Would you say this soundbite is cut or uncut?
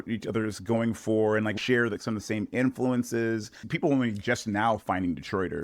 cut